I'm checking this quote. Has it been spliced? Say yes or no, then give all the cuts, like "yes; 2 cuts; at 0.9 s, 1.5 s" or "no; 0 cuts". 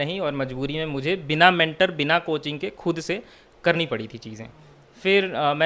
no; 0 cuts